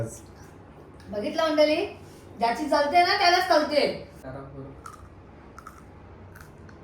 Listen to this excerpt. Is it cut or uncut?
cut